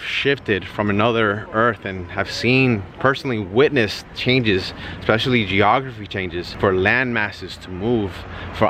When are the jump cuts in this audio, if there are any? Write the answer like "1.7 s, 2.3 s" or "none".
6.4 s